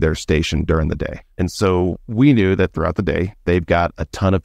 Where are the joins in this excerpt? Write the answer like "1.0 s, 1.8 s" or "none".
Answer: 1.2 s, 3.3 s